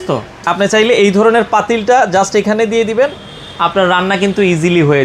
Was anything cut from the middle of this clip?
no; 0 cuts

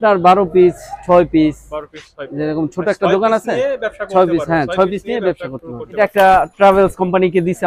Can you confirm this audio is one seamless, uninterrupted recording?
no; 1 cut; at 6.0 s

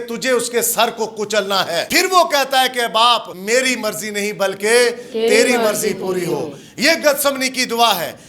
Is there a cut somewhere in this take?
yes; 2 cuts; at 1.9 s, 3.3 s

